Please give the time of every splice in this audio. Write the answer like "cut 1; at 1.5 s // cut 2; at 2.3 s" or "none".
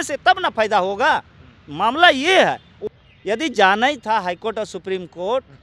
cut 1; at 2.9 s